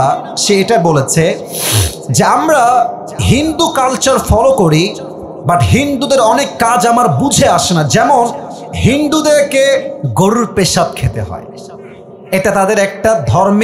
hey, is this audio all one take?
no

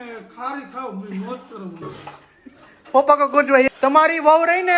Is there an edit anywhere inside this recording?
yes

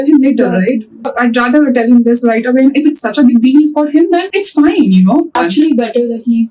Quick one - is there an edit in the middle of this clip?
yes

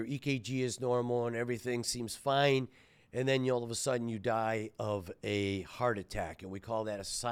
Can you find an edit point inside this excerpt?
no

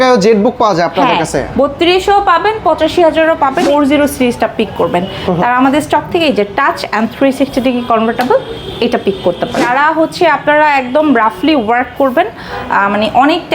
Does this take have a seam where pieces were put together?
yes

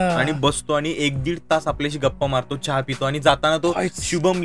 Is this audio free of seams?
yes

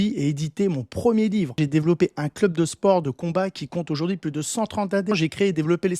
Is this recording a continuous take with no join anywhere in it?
no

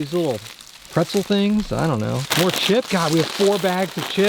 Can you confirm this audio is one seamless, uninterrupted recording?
no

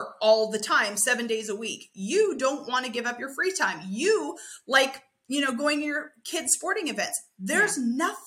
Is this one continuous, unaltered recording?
yes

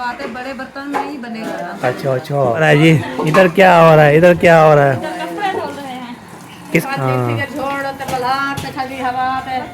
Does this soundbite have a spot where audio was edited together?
yes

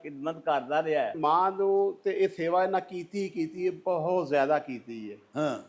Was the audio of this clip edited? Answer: yes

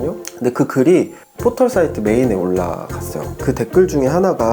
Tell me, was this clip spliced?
yes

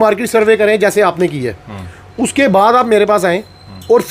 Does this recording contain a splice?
no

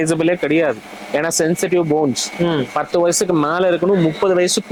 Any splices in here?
no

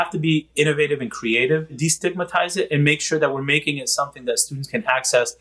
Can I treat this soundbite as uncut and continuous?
no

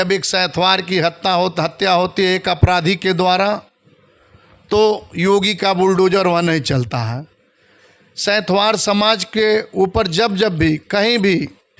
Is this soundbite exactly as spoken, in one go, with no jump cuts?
yes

